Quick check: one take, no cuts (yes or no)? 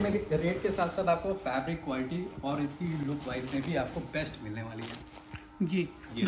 yes